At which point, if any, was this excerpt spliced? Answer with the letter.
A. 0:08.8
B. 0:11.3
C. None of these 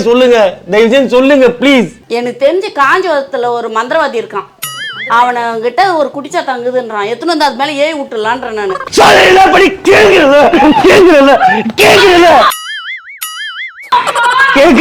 A